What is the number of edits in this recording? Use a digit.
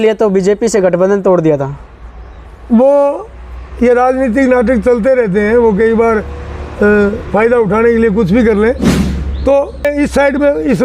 1